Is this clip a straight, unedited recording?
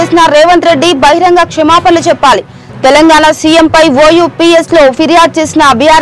yes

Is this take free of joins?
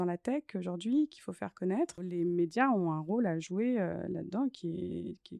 no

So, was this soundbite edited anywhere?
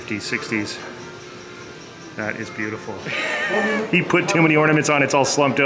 yes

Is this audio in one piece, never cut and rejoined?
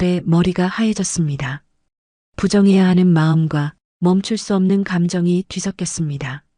yes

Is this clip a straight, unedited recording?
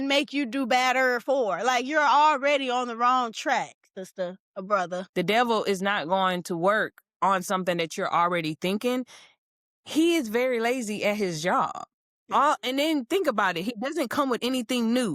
no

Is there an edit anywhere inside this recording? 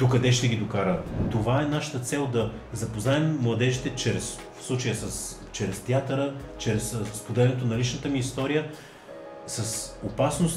yes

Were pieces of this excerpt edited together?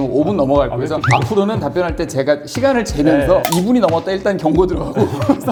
no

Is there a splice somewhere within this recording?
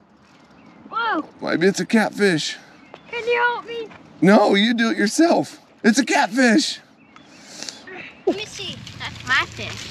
yes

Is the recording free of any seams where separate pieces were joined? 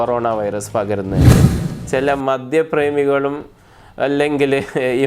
no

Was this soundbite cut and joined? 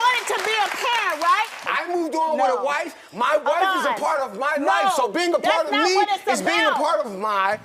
yes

